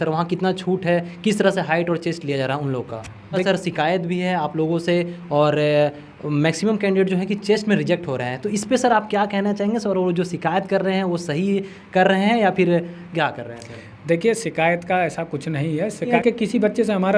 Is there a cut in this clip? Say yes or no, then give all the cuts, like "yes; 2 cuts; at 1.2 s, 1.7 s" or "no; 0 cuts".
yes; 2 cuts; at 3.4 s, 16.1 s